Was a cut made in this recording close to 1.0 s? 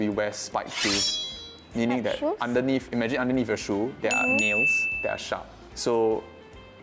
no; 0 cuts

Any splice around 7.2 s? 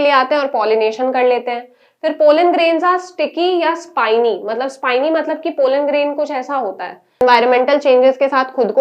yes; 1 cut; at 7.2 s

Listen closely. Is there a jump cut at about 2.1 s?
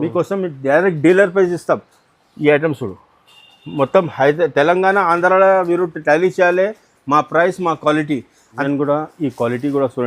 no; 1 cut; at 8.4 s

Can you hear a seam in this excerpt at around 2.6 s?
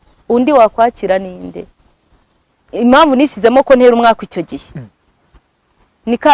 no; 0 cuts

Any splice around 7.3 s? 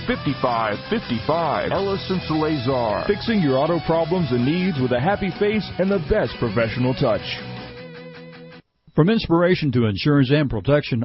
no; 0 cuts

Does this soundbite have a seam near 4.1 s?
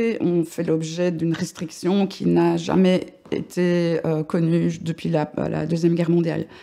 no; 1 cut; at 1.2 s

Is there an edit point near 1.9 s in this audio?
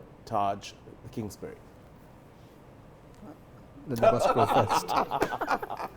yes; 1 cut; at 1.9 s

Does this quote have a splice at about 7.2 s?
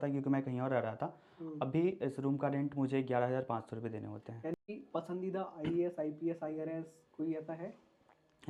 no; 1 cut; at 4.6 s

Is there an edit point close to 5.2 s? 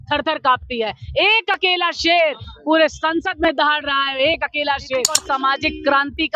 yes; 1 cut; at 5.2 s

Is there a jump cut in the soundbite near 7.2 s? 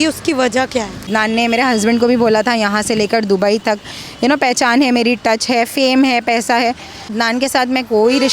yes; 2 cuts; at 1.1 s, 7.2 s

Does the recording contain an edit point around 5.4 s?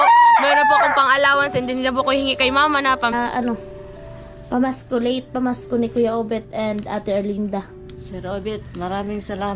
no; 1 cut; at 3.1 s

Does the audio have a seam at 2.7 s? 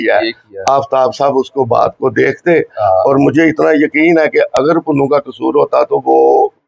no; 0 cuts

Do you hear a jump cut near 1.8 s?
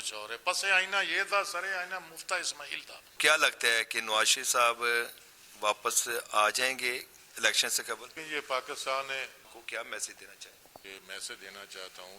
no; 4 cuts; at 3.2 s, 8.2 s, 9.5 s, 10.8 s

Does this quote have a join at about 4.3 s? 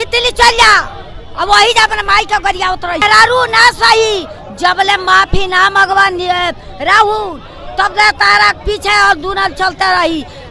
no; 1 cut; at 3.0 s

